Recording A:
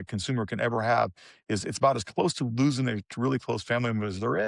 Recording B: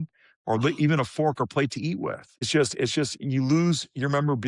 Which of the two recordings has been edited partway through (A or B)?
B